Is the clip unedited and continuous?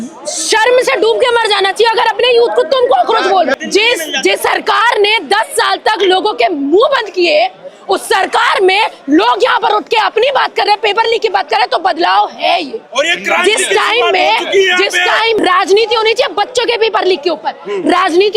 no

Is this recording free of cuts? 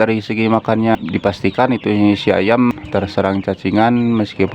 no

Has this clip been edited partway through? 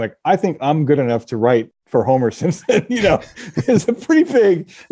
no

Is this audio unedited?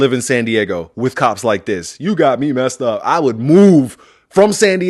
yes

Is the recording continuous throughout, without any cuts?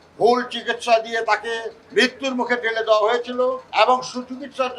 no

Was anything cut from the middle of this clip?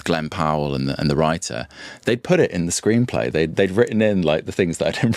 no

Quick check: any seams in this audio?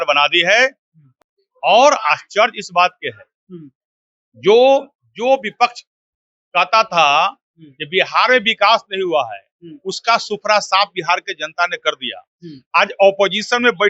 yes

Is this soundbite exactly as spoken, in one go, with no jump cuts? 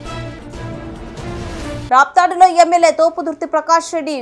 yes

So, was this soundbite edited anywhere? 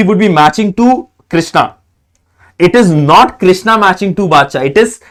no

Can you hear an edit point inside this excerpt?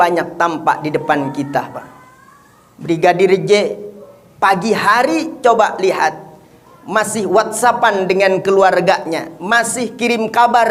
no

